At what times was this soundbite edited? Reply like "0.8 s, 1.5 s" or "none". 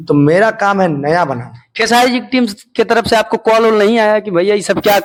none

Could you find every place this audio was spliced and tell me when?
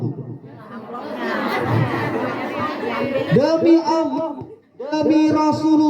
none

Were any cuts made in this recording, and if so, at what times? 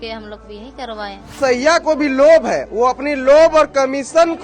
1.4 s

